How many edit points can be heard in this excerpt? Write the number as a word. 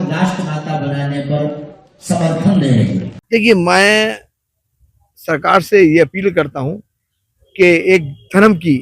one